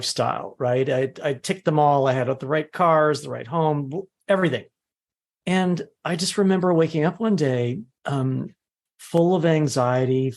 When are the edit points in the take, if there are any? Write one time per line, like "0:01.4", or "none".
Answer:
0:07.9